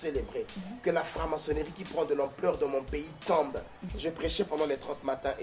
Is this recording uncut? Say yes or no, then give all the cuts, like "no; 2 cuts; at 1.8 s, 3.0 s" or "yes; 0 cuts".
no; 1 cut; at 3.8 s